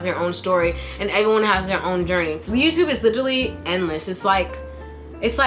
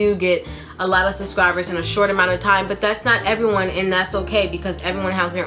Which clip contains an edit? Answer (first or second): first